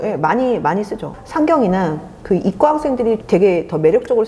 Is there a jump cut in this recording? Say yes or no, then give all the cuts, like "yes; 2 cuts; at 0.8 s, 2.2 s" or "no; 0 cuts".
yes; 2 cuts; at 1.2 s, 3.2 s